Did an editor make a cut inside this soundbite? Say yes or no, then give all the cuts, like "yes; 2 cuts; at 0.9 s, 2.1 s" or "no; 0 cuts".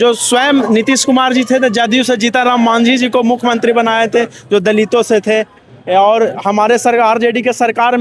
no; 0 cuts